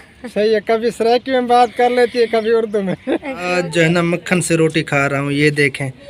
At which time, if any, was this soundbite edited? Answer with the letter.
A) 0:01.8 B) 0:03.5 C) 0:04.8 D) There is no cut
B